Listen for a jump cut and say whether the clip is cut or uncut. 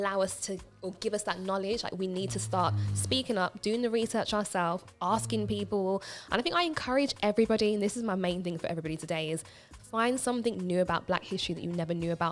uncut